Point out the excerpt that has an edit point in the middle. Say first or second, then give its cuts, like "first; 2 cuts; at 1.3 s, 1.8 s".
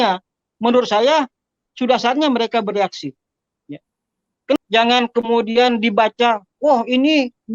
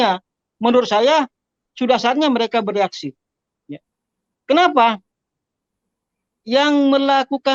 first; 1 cut; at 4.6 s